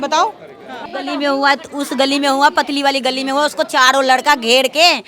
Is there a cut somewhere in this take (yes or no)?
yes